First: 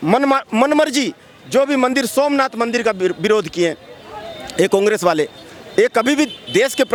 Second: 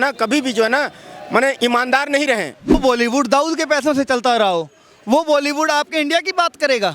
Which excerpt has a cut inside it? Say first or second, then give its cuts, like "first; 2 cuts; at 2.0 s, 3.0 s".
second; 1 cut; at 2.8 s